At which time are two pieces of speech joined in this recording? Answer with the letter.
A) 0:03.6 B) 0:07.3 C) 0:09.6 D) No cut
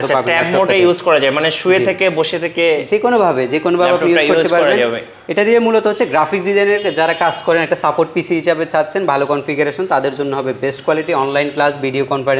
D